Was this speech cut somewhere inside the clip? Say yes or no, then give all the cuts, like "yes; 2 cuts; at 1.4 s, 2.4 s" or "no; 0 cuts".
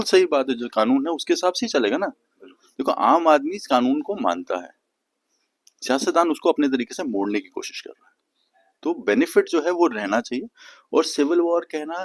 no; 0 cuts